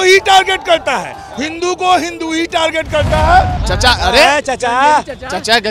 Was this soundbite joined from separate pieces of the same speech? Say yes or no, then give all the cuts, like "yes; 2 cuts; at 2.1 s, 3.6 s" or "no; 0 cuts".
yes; 1 cut; at 3.6 s